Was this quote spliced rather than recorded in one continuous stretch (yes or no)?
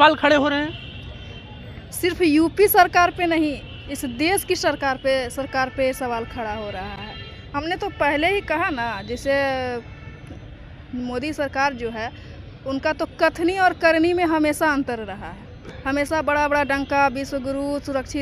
no